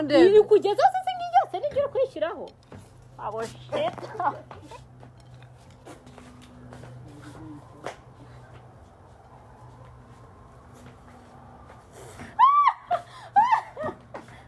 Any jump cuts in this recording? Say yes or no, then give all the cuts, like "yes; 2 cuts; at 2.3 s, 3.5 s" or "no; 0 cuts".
no; 0 cuts